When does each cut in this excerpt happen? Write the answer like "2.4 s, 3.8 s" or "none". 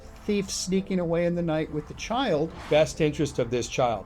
2.6 s